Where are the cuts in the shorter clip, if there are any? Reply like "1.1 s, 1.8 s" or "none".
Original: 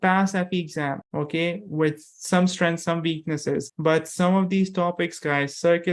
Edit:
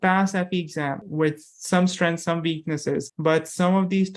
1.0 s